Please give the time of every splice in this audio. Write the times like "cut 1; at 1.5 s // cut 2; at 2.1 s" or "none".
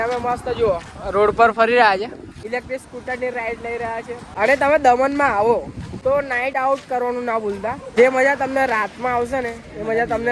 cut 1; at 2.3 s // cut 2; at 4.3 s // cut 3; at 6.2 s